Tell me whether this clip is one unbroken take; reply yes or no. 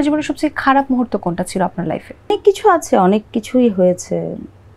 yes